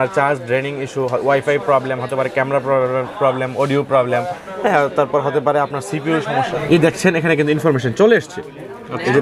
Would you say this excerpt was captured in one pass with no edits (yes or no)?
no